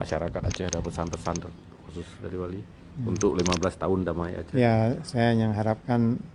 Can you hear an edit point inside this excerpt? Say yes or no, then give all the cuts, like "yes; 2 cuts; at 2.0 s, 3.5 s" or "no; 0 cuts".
no; 0 cuts